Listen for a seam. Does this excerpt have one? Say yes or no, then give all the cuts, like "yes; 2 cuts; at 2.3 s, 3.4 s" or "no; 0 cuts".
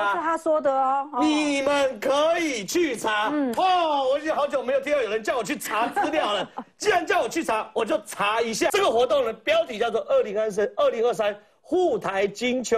yes; 1 cut; at 8.7 s